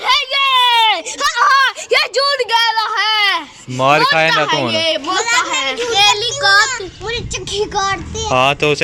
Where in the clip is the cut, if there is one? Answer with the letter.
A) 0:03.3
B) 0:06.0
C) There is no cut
B